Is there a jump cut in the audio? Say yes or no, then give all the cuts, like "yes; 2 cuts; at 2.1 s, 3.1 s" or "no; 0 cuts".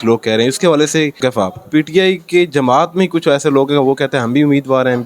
yes; 1 cut; at 1.3 s